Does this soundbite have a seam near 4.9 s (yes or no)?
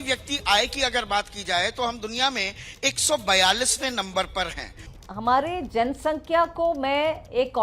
yes